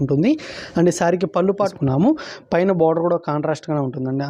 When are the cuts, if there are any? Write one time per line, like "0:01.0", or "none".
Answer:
0:01.6